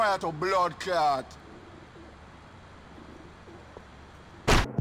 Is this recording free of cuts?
yes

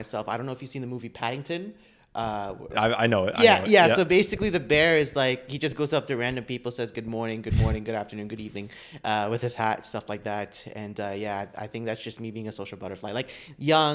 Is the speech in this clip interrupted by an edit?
no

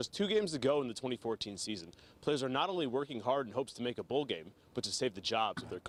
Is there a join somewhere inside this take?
no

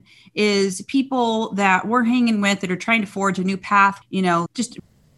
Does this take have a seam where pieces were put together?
yes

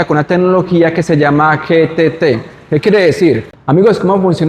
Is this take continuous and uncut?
no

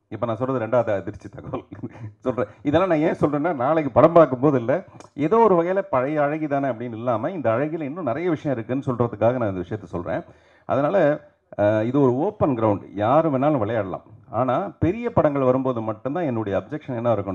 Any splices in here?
no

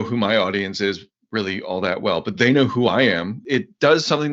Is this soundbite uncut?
no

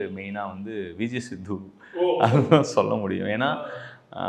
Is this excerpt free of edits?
yes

